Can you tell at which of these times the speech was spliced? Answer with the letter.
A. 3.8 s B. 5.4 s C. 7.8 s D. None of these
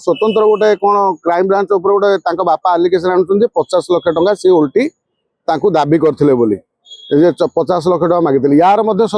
D